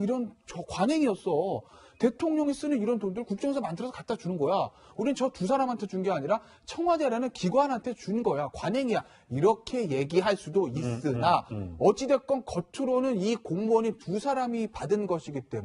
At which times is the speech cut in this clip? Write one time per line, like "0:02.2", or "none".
0:14.4

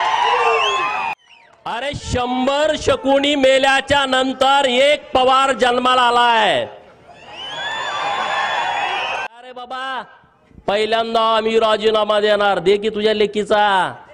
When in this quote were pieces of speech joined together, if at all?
0:01.1
0:09.5

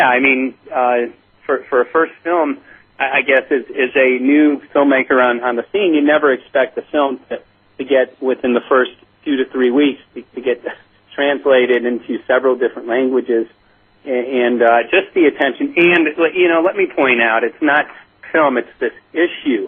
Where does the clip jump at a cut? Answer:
0:15.6

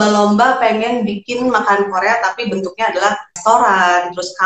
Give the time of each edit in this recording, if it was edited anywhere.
0:03.3

